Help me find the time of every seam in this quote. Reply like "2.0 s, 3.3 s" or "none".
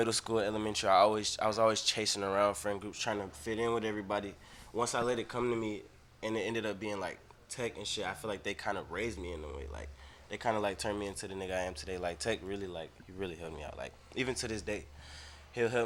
none